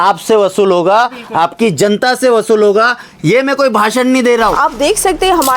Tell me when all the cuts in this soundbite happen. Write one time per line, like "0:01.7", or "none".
0:04.6